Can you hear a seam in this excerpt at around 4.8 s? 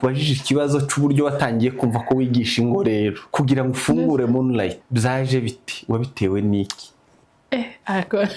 yes; 2 cuts; at 3.2 s, 4.8 s

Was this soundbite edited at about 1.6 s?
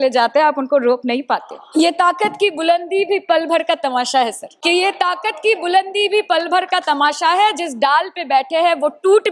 yes; 2 cuts; at 1.6 s, 4.5 s

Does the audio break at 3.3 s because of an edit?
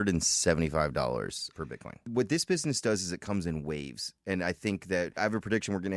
no; 2 cuts; at 1.7 s, 5.2 s

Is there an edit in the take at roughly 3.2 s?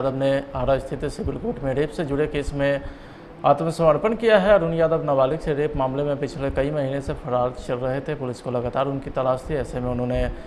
no; 0 cuts

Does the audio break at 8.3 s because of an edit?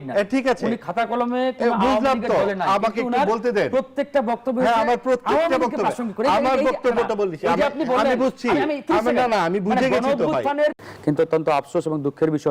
no; 1 cut; at 10.8 s

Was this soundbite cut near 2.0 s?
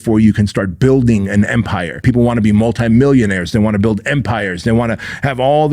yes; 1 cut; at 2.0 s

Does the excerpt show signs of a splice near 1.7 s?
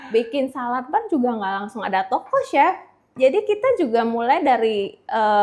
no; 1 cut; at 3.1 s

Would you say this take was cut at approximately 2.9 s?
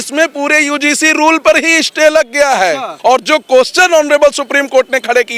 yes; 1 cut; at 2.9 s

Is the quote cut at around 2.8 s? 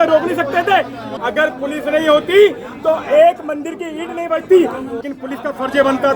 no; 2 cuts; at 1.1 s, 4.9 s

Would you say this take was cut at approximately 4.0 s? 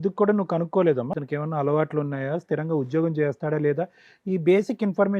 no; 1 cut; at 1.1 s

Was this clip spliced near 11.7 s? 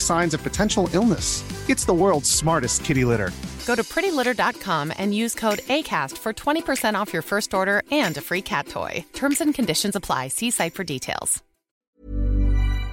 yes; 1 cut; at 11.7 s

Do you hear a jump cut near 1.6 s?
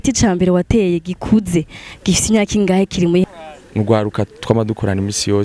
no; 1 cut; at 3.2 s

